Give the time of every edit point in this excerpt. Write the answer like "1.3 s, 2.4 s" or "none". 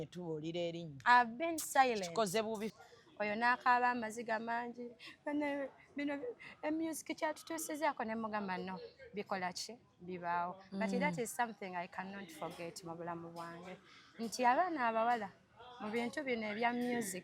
2.7 s